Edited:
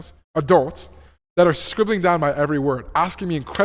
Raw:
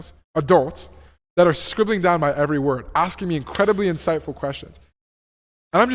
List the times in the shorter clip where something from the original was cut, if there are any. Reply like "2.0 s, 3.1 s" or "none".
none